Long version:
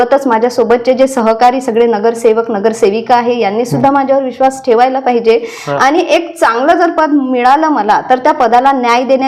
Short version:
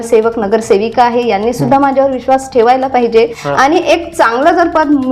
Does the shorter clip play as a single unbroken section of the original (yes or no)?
no